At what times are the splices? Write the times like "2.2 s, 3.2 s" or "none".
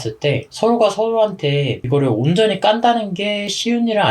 1.8 s